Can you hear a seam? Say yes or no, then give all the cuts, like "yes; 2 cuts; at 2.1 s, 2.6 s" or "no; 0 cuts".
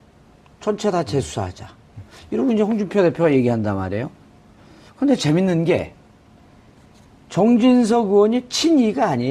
no; 0 cuts